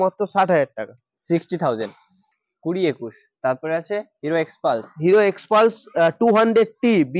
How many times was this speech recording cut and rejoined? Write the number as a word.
one